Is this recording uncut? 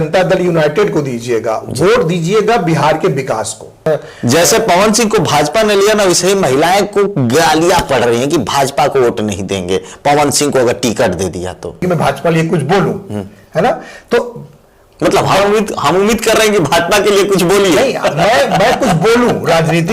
no; 2 cuts; at 3.9 s, 11.8 s

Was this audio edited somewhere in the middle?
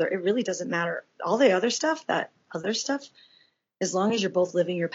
yes; 1 cut; at 2.6 s

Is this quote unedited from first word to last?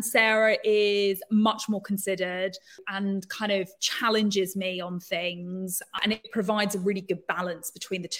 no; 2 cuts; at 2.9 s, 6.0 s

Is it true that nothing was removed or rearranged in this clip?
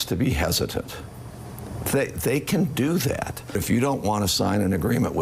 no; 1 cut; at 3.6 s

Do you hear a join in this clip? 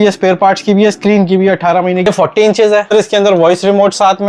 yes; 2 cuts; at 2.1 s, 2.9 s

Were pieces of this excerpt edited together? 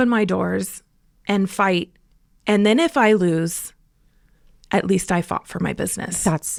no; 0 cuts

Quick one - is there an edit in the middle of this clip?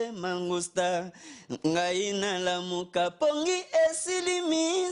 no; 0 cuts

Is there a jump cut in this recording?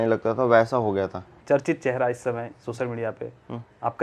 yes; 1 cut; at 1.4 s

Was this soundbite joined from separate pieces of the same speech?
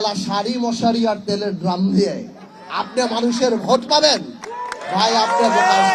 no; 0 cuts

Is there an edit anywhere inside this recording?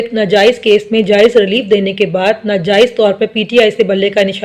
no; 0 cuts

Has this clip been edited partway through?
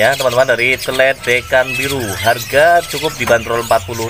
no; 0 cuts

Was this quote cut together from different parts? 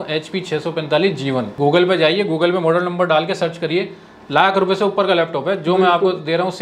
yes; 1 cut; at 1.5 s

